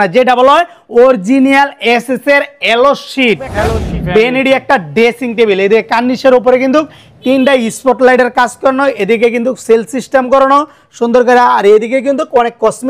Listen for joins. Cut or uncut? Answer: cut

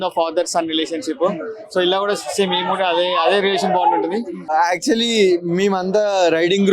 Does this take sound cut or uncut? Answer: cut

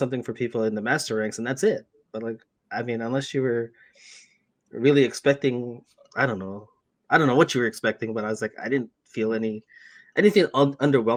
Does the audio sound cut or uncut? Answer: uncut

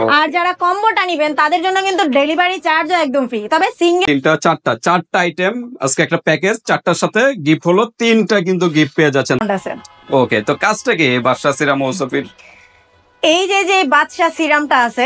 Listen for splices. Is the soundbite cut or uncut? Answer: cut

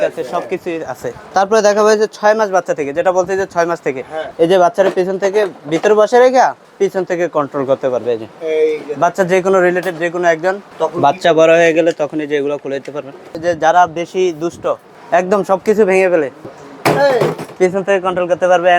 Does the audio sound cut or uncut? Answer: cut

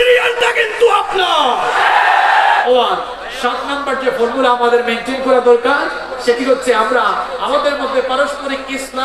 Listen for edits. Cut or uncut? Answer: cut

